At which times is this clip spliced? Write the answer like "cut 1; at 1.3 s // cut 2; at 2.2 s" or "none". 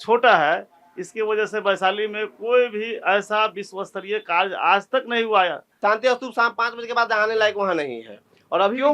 cut 1; at 5.7 s